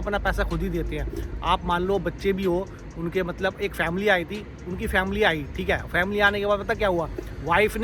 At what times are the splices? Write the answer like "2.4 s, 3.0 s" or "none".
none

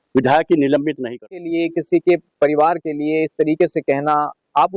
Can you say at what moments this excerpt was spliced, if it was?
1.4 s

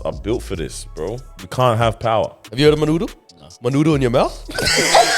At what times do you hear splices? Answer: 1.3 s, 2.4 s

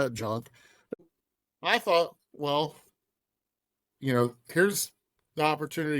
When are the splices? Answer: 1.0 s

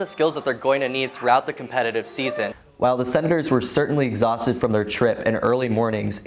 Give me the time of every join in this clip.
2.6 s

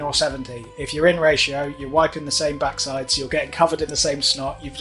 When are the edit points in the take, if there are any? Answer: none

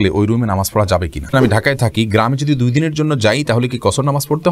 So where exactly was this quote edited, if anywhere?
1.3 s

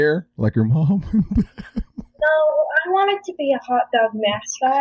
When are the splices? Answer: none

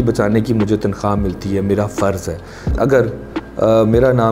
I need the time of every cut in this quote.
2.7 s

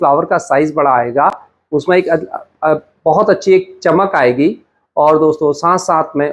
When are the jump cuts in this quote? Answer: none

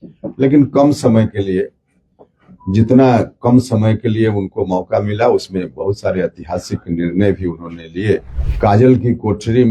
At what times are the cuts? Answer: 8.4 s

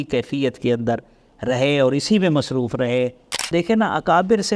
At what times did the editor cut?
3.4 s

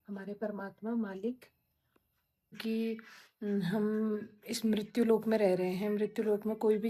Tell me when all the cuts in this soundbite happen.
2.6 s

